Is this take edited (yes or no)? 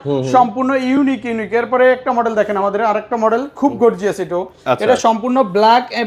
no